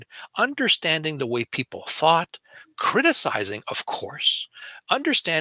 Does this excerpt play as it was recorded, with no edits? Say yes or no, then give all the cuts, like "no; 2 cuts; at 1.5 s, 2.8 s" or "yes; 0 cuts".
yes; 0 cuts